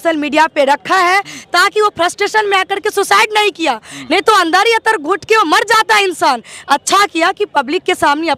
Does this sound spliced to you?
no; 0 cuts

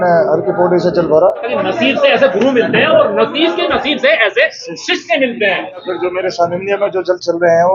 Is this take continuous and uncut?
no; 2 cuts; at 1.5 s, 5.9 s

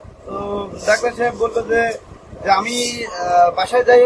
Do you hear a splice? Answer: no; 0 cuts

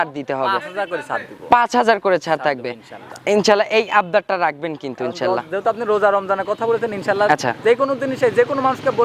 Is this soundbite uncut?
yes; 0 cuts

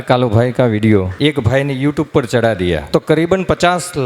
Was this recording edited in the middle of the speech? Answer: yes; 2 cuts; at 1.1 s, 2.8 s

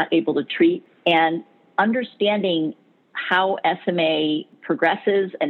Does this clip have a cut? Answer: yes; 2 cuts; at 0.9 s, 4.5 s

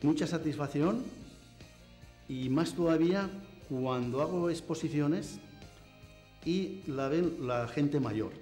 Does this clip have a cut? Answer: no; 0 cuts

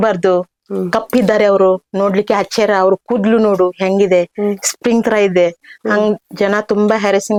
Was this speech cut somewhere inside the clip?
no; 0 cuts

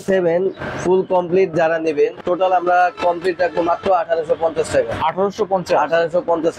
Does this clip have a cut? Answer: yes; 1 cut; at 2.2 s

